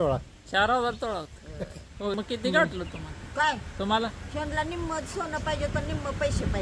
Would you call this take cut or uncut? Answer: cut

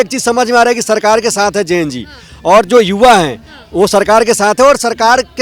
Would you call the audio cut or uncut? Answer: uncut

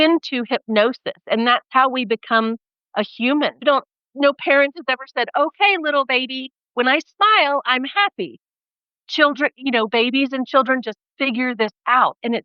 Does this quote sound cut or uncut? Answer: uncut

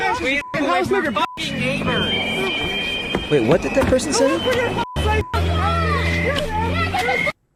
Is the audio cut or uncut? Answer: uncut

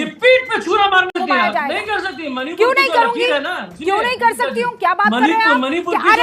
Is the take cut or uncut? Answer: cut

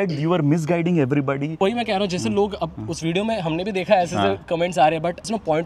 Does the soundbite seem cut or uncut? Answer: cut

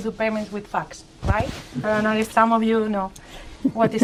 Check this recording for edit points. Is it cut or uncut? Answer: uncut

